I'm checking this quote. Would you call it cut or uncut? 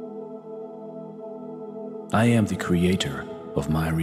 cut